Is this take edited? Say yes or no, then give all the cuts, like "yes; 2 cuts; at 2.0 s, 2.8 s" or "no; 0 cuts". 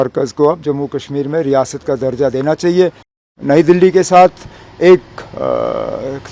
yes; 1 cut; at 3.2 s